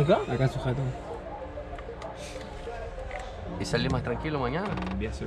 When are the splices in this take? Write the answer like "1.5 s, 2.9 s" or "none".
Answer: none